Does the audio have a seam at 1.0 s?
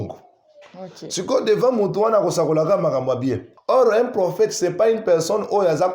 no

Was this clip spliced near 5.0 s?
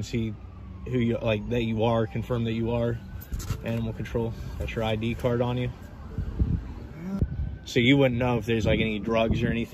no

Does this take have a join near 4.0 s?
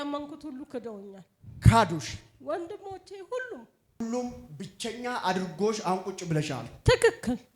yes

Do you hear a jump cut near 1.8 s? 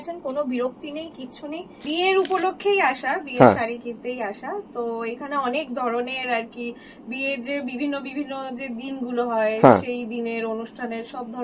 yes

